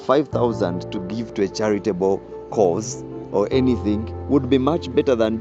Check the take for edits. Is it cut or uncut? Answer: uncut